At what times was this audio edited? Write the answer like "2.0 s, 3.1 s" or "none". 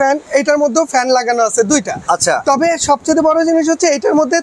none

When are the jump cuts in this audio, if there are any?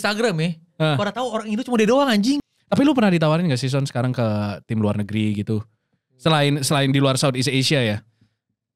2.4 s

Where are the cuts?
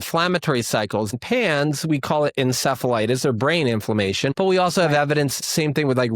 1.1 s, 4.3 s, 5.4 s

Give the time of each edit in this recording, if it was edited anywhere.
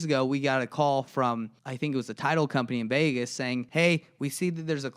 1.6 s, 3.7 s

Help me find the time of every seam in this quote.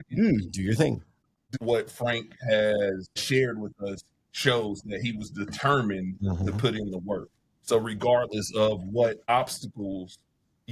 1.4 s

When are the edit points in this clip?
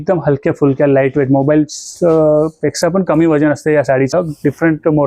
4.1 s

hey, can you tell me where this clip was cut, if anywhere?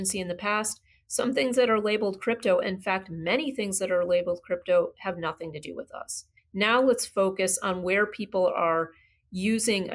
6.4 s

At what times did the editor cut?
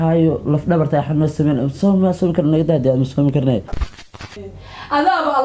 3.9 s

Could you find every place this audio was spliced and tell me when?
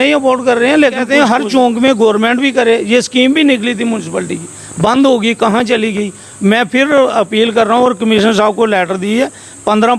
1.0 s

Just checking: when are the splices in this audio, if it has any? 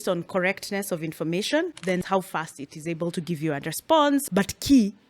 2.0 s, 4.2 s

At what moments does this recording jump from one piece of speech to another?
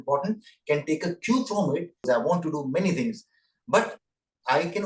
2.0 s

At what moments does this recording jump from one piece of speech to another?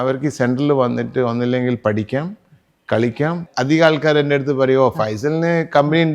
3.5 s

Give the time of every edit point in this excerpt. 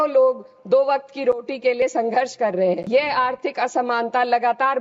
2.8 s

